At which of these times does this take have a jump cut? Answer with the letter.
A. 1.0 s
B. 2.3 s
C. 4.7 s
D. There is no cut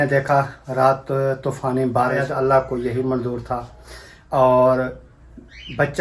B